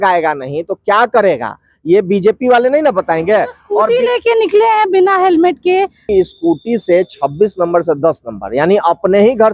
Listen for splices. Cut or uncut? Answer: cut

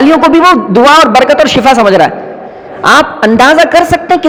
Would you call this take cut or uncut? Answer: uncut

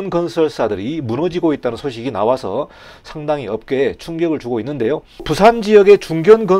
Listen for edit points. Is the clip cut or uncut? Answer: cut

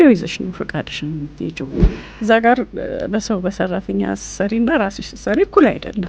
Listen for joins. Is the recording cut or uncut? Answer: cut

